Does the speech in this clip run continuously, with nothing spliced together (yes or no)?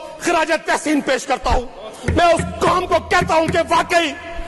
yes